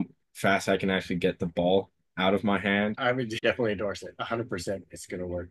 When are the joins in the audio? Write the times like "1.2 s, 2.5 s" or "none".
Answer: 3.0 s